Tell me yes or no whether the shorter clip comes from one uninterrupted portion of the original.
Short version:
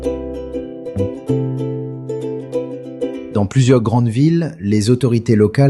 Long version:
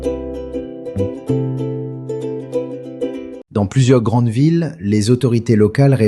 no